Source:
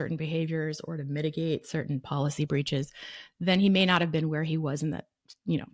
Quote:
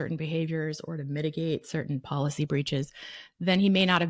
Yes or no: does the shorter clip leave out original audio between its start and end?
no